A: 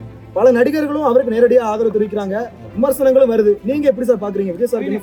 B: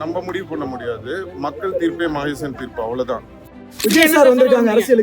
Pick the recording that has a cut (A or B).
B